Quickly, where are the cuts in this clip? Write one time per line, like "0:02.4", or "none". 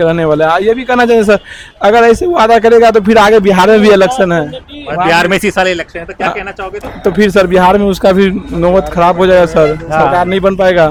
none